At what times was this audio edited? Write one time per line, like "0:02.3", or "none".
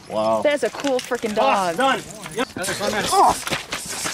0:02.4